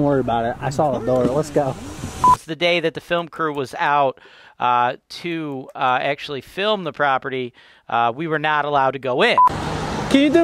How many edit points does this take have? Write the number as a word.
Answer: two